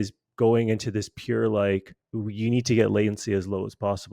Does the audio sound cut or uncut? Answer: cut